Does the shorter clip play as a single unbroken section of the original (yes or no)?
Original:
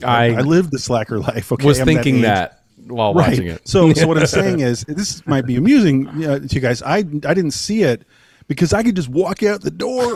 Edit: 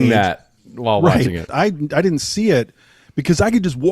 no